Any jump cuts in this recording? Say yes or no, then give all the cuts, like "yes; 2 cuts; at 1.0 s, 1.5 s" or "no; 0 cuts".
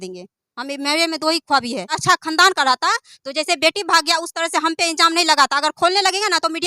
yes; 1 cut; at 2.0 s